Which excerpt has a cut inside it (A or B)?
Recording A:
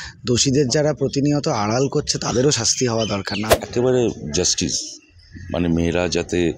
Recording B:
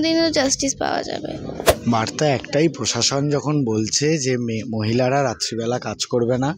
A